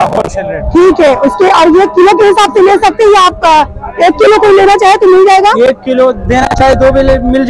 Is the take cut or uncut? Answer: uncut